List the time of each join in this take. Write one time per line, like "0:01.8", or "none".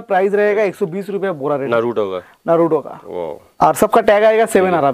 0:01.7
0:03.4